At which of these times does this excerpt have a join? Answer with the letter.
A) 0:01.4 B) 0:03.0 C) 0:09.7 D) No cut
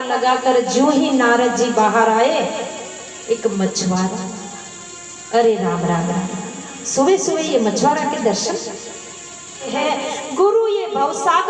C